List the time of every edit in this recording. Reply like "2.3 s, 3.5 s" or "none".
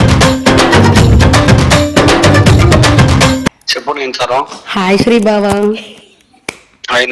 3.7 s